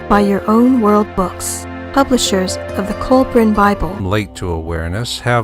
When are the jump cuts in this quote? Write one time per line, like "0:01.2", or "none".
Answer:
none